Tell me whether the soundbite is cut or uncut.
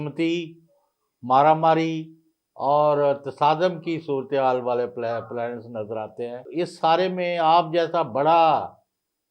cut